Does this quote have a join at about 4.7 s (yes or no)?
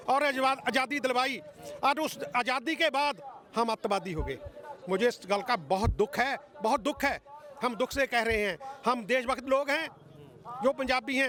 no